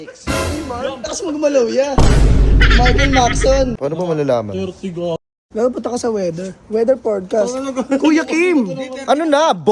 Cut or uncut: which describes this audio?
cut